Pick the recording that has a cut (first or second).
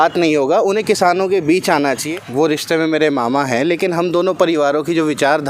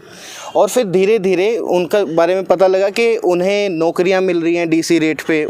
first